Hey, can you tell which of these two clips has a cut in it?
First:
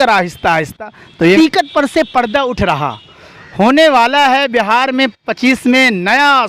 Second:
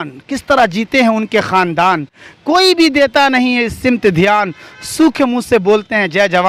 first; 1 cut; at 1.4 s

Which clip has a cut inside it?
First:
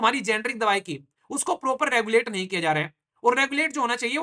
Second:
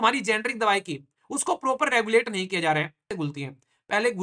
second; 1 cut; at 3.1 s

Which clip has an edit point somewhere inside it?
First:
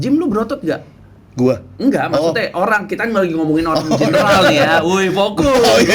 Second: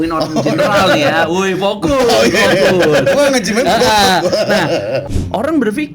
second; 1 cut; at 5.1 s

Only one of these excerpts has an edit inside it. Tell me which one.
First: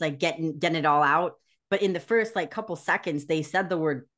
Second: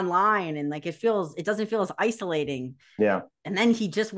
second; 1 cut; at 3.3 s

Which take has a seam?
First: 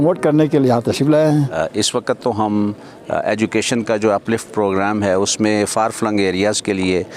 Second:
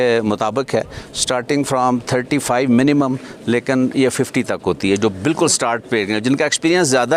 first; 1 cut; at 1.5 s

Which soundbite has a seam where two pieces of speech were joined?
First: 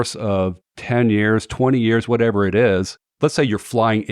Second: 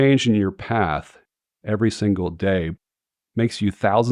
first; 1 cut; at 3.0 s

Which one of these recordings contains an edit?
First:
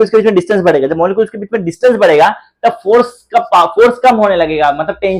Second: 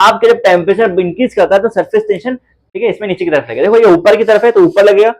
second; 1 cut; at 2.6 s

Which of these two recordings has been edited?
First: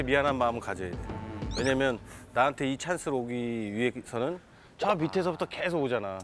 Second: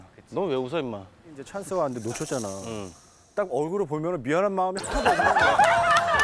second; 1 cut; at 1.5 s

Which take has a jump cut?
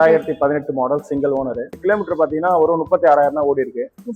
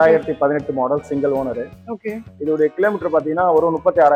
first; 1 cut; at 1.8 s

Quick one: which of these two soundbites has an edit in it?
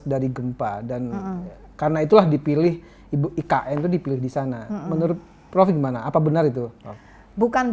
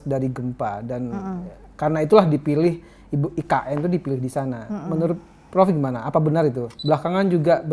second; 1 cut; at 6.7 s

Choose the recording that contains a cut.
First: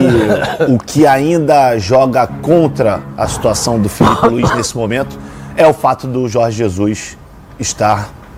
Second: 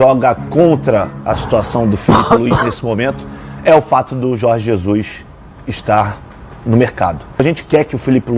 second; 1 cut; at 7.4 s

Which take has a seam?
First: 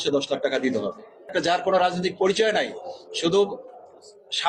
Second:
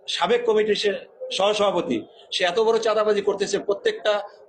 first; 1 cut; at 1.3 s

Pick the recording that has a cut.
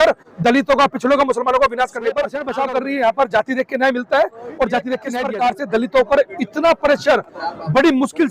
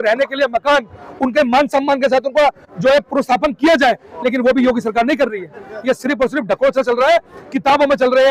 first; 2 cuts; at 2.4 s, 5.1 s

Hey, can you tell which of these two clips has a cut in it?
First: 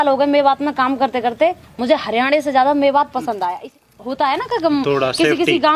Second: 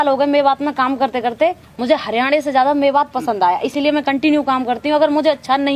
first; 1 cut; at 3.7 s

